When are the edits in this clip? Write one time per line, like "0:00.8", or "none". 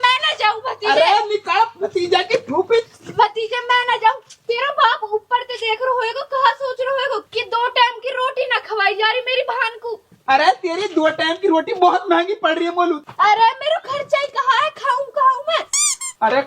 0:02.9